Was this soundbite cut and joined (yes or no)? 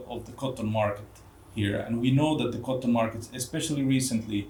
no